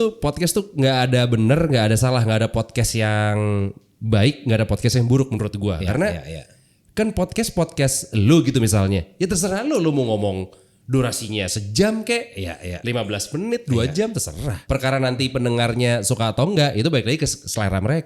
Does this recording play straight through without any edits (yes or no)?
no